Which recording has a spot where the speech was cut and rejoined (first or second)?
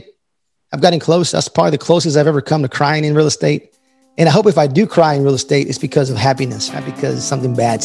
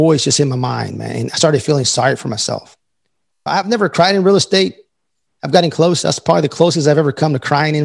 first